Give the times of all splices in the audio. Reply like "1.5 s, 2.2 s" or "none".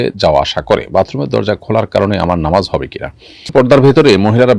3.5 s

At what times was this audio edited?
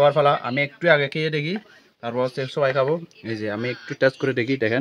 none

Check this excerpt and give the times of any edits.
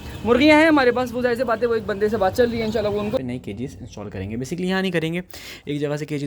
3.2 s

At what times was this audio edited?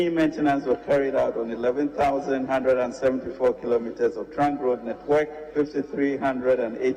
5.4 s

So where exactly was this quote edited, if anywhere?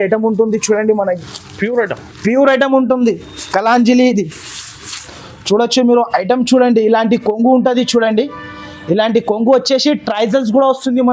none

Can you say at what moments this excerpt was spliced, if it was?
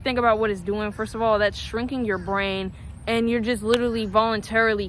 none

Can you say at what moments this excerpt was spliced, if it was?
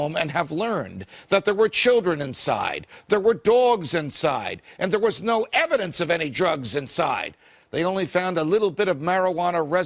7.9 s

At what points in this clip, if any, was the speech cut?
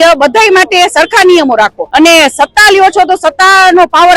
1.8 s

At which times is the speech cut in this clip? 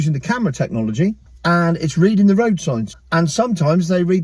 1.3 s, 3.0 s

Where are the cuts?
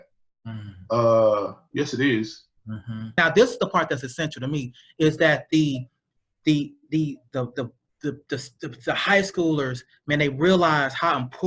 3.1 s

